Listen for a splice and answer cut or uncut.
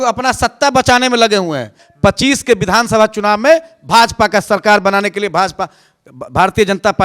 cut